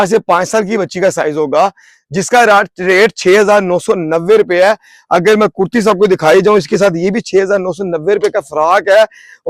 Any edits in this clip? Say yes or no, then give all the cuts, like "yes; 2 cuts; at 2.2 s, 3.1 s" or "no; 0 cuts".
no; 0 cuts